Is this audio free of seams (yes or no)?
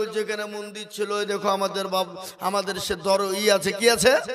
yes